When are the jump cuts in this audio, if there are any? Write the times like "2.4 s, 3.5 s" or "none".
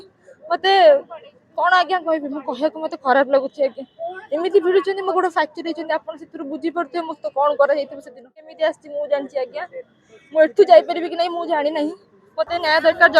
8.5 s